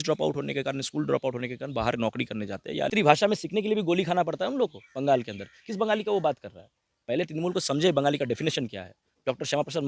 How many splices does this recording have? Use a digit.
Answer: 1